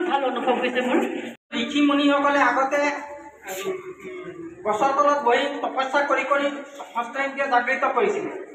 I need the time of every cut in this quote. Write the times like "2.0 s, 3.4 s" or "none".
1.5 s